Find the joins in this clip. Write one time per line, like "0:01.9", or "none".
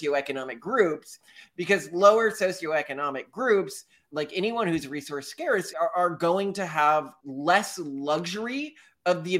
0:05.7
0:07.2